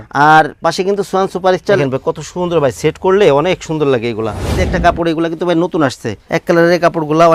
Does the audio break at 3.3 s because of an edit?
no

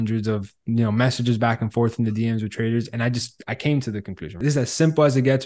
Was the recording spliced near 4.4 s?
yes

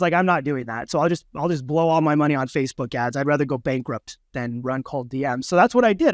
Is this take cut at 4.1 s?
no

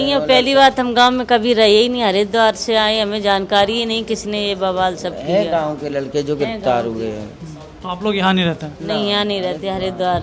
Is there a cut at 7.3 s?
no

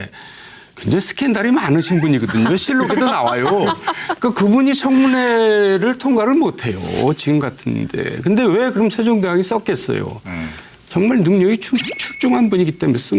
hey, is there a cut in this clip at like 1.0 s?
no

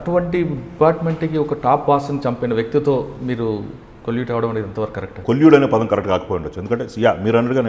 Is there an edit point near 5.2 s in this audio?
yes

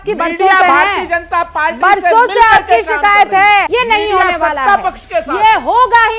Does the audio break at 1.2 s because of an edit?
no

